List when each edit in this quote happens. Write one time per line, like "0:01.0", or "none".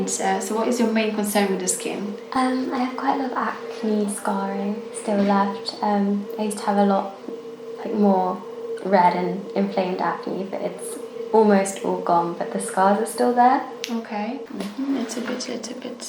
0:14.5

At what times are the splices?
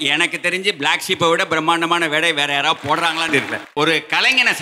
0:03.6

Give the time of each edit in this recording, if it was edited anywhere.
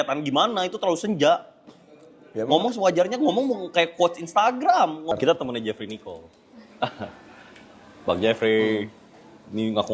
0:05.1

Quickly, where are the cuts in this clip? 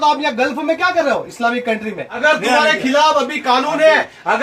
0:02.2

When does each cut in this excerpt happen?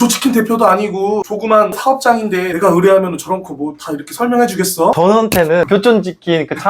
0:01.8
0:04.9

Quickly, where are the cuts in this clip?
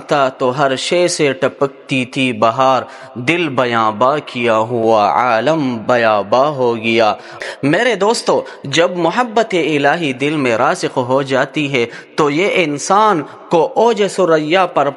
0:07.3

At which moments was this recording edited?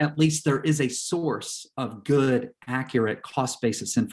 none

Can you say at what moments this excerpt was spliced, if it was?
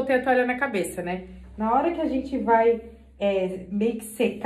none

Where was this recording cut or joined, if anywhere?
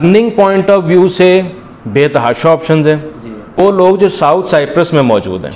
0:03.6

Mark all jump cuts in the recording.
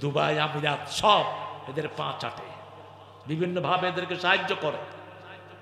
none

